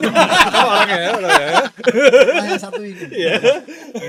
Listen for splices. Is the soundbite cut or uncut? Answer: uncut